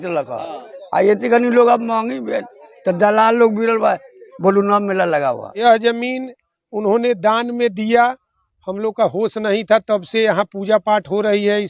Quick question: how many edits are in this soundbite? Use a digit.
1